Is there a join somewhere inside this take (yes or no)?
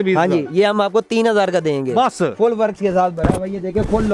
no